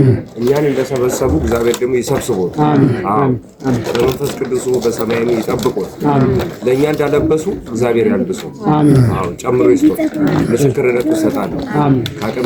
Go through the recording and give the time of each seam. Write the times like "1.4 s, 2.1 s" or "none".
none